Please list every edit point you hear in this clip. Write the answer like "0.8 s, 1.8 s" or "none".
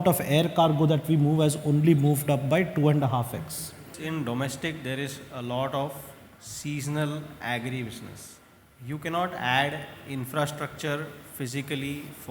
4.0 s